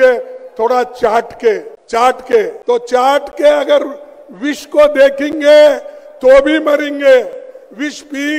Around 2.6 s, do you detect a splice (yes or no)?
yes